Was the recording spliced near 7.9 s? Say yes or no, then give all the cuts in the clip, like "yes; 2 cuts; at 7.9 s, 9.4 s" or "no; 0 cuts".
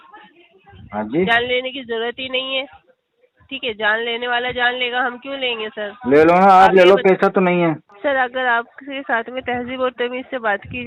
yes; 1 cut; at 7.9 s